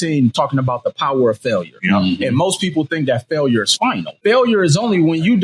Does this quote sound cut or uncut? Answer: cut